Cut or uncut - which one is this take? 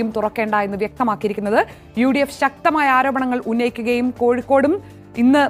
uncut